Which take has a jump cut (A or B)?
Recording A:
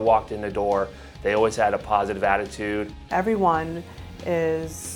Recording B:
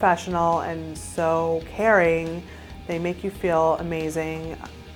A